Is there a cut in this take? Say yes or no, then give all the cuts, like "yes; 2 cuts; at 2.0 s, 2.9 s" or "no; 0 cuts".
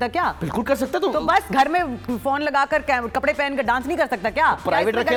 no; 0 cuts